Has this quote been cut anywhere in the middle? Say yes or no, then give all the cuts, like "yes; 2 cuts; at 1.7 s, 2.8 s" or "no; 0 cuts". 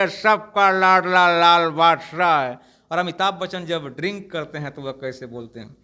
no; 0 cuts